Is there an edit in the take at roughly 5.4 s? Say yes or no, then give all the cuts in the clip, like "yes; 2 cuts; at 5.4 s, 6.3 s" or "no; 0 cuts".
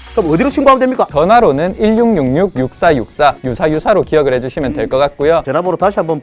yes; 2 cuts; at 3.4 s, 5.4 s